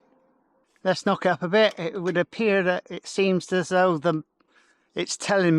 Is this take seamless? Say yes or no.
yes